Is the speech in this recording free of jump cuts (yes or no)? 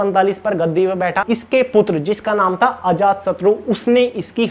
no